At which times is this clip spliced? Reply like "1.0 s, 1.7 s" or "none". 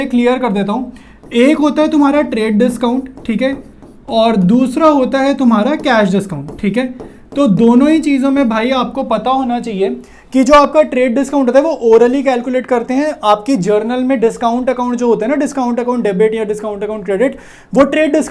none